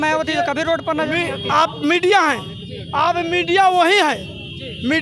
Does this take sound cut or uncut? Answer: uncut